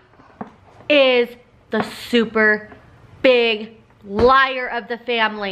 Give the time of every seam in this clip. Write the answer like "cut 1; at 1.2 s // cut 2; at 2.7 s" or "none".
none